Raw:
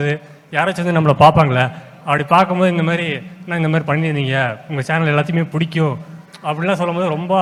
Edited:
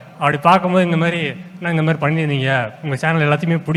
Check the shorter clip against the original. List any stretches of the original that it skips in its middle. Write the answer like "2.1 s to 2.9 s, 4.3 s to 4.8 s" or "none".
none

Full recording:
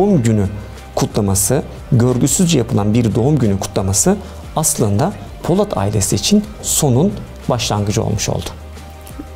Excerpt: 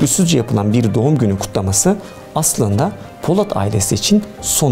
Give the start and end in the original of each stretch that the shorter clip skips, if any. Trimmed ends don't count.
none

